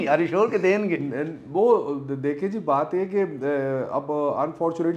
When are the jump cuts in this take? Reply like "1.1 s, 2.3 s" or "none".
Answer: none

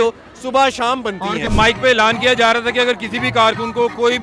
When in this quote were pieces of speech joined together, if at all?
1.5 s

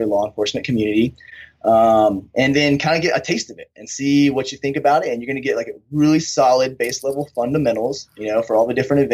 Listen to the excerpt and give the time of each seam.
none

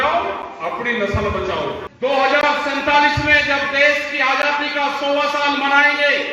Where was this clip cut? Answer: 1.9 s

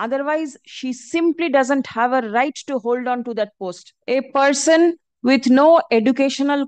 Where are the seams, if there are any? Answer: 3.9 s

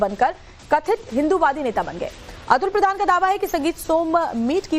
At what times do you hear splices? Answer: none

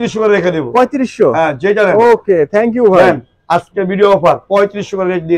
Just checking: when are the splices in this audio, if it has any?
none

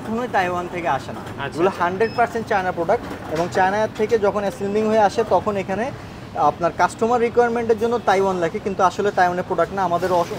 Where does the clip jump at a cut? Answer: none

